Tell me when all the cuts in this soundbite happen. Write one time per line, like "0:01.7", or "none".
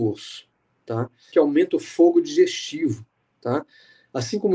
0:01.2